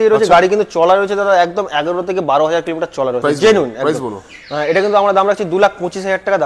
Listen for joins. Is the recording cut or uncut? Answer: uncut